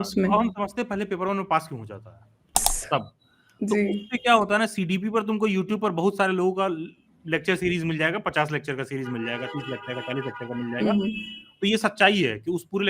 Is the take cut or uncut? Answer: cut